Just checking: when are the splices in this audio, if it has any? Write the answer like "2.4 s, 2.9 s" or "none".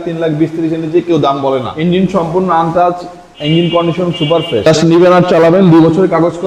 1.7 s, 4.7 s